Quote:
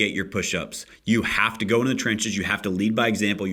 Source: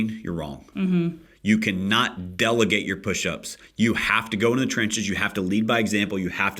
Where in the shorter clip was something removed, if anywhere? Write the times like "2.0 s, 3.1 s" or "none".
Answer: none